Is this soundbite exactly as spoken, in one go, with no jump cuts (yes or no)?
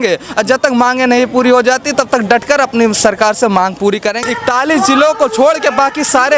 no